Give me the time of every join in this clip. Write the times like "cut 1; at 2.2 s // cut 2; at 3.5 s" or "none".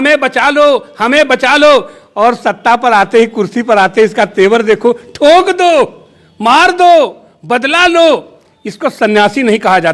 none